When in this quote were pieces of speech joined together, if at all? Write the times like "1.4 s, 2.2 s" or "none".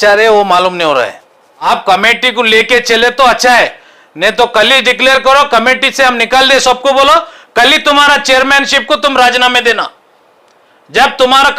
1.6 s